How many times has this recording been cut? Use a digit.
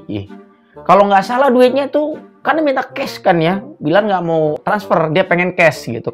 1